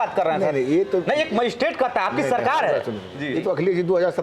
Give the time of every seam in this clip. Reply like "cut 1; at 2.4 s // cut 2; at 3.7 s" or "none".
cut 1; at 3.1 s